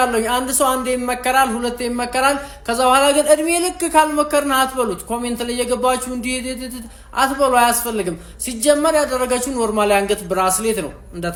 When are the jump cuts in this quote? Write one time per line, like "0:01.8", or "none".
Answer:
none